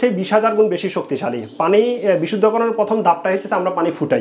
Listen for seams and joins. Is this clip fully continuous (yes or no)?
yes